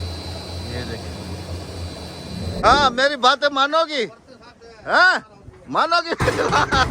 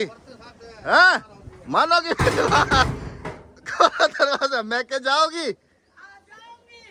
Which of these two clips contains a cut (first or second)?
first